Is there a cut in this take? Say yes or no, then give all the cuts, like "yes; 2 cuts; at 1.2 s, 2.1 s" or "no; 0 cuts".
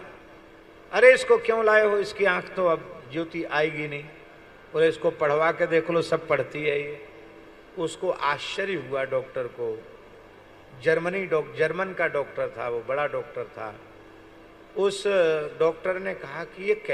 no; 0 cuts